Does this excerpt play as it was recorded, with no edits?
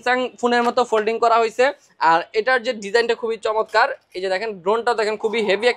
yes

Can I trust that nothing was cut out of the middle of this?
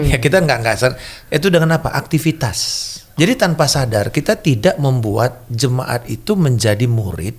no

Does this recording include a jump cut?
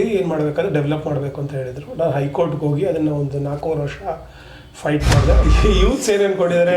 yes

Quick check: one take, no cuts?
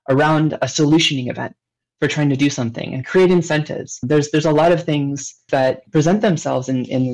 yes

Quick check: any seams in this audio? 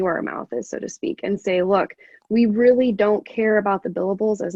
no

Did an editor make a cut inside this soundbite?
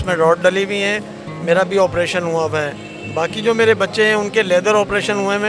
no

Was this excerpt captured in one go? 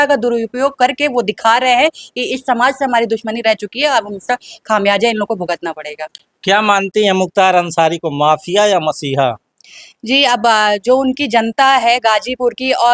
yes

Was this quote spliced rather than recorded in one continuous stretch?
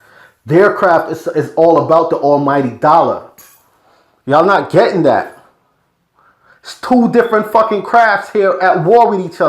yes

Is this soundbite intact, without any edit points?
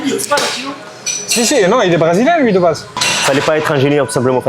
no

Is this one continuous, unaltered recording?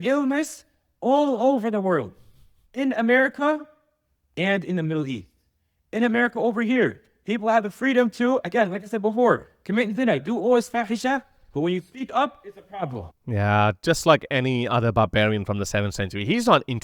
yes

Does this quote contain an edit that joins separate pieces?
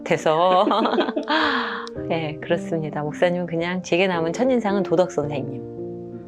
no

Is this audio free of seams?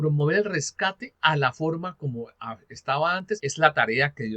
no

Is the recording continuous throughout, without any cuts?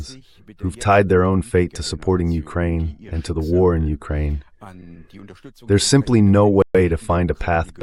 yes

